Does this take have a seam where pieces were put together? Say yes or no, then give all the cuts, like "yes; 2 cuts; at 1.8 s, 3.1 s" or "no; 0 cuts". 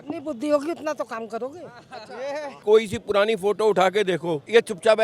yes; 1 cut; at 2.5 s